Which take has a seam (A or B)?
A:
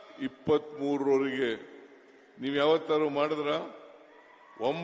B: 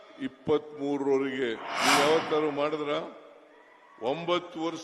B